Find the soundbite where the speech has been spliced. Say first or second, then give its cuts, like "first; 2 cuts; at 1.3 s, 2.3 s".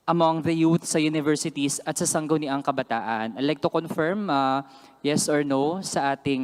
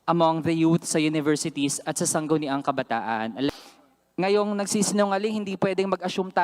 second; 1 cut; at 3.5 s